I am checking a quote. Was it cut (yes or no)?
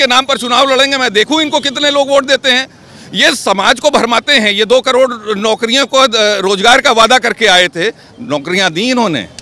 no